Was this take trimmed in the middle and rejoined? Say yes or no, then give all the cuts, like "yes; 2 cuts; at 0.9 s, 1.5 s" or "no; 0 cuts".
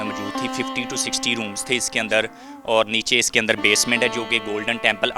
no; 0 cuts